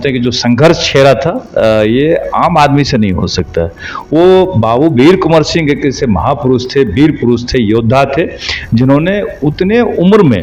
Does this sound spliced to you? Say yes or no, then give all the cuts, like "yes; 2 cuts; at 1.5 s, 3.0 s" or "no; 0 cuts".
no; 0 cuts